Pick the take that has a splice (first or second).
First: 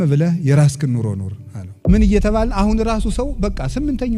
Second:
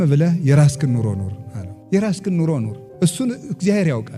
first